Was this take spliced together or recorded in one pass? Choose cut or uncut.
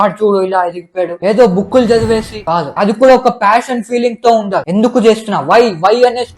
cut